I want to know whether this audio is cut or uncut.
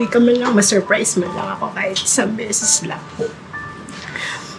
uncut